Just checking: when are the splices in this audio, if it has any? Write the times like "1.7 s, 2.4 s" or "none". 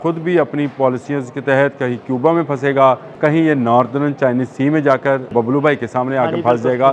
3.1 s, 5.3 s